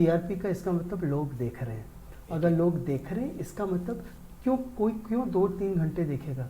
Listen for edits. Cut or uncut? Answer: uncut